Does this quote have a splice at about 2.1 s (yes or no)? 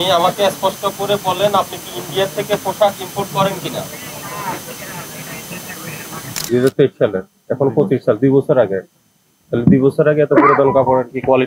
no